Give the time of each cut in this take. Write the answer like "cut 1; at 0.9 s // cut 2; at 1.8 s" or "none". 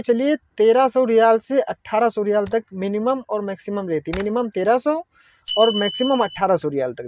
none